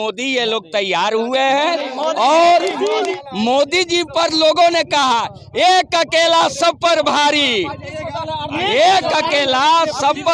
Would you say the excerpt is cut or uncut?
cut